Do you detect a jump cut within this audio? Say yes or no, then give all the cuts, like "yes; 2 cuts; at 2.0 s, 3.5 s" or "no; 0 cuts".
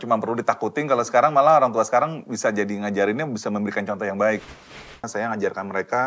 yes; 1 cut; at 4.5 s